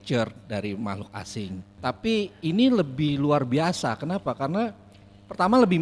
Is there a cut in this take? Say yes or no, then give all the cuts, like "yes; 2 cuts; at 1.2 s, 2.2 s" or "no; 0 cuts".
yes; 1 cut; at 1.7 s